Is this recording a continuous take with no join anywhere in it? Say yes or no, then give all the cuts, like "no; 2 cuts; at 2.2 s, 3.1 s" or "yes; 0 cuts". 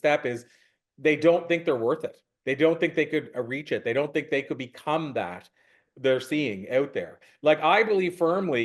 yes; 0 cuts